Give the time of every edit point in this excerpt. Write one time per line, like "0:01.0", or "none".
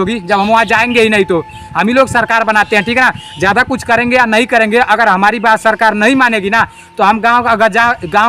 0:01.6